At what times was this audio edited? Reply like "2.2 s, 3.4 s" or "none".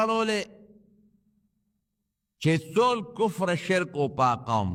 none